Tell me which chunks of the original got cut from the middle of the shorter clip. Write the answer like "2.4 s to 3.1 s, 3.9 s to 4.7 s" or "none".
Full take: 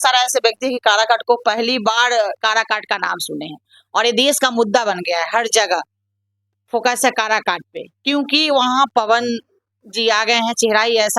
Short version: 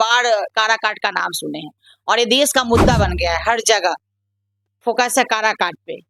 none